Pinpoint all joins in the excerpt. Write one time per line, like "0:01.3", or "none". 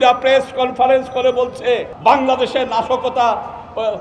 0:01.9

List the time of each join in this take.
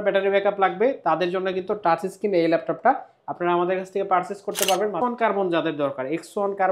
0:05.0

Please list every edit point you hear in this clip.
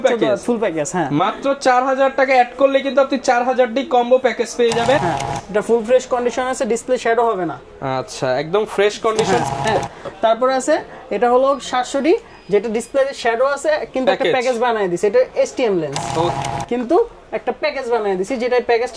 0:05.0
0:09.5
0:16.3

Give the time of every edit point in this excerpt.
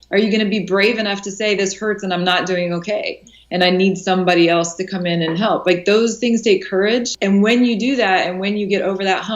0:07.1

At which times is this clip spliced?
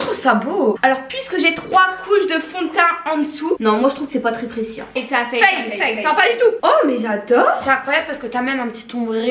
0:03.6
0:06.6

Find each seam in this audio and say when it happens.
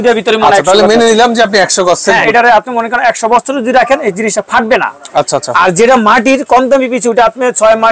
0:02.3

